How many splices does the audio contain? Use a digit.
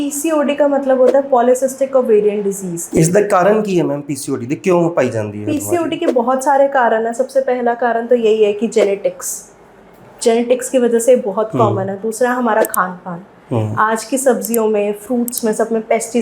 1